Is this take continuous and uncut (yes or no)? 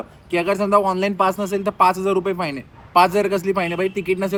yes